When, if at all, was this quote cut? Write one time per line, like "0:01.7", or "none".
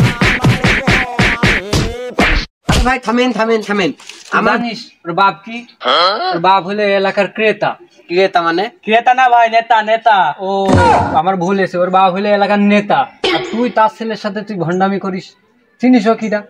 0:04.5